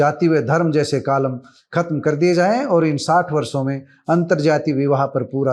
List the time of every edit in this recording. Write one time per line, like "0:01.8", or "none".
none